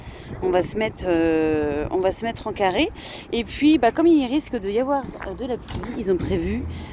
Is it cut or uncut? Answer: uncut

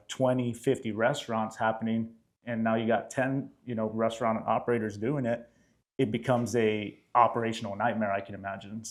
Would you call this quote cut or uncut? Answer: uncut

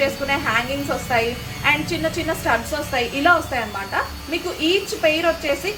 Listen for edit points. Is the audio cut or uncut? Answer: uncut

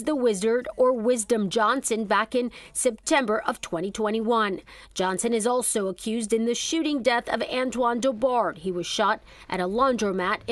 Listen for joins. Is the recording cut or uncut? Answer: uncut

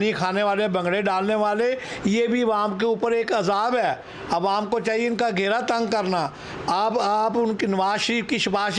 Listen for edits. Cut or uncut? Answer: uncut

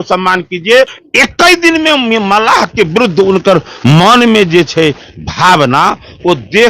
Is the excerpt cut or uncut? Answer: cut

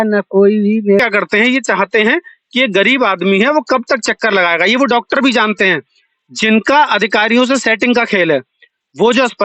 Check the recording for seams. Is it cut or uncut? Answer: cut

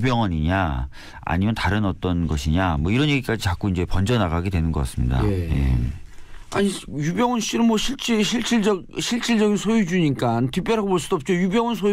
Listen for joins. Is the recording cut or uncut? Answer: cut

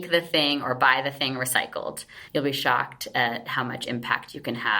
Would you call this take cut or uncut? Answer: cut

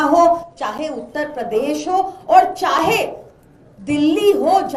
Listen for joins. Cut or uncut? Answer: uncut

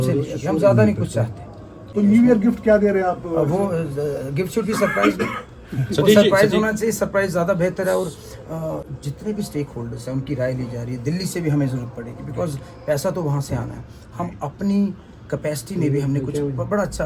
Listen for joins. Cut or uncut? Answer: cut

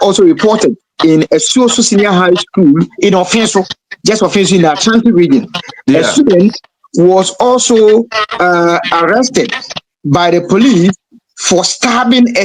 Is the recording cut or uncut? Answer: uncut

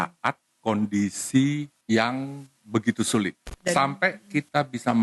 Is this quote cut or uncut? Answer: cut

